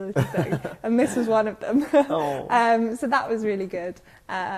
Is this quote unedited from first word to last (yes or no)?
yes